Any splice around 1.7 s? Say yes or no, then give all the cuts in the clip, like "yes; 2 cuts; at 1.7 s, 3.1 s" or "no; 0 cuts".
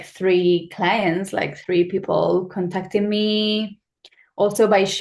no; 0 cuts